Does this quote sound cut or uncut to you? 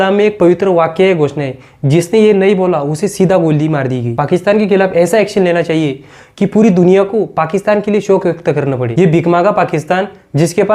cut